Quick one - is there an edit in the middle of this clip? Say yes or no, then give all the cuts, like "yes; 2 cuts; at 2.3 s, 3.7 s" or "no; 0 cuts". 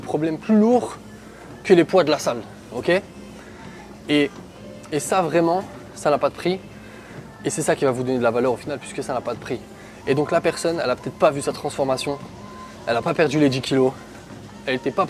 no; 0 cuts